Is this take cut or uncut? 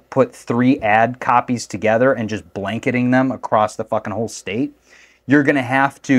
uncut